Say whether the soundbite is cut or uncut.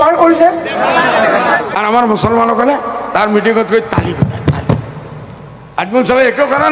cut